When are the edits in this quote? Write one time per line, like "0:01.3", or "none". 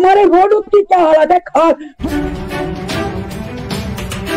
0:01.9